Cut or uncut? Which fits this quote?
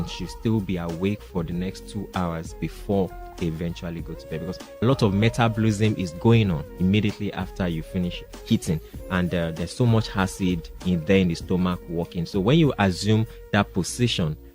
cut